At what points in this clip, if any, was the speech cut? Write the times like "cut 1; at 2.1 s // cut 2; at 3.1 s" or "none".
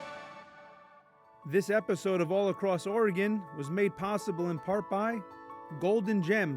cut 1; at 1.0 s